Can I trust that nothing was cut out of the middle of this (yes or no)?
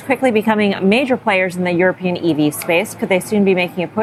yes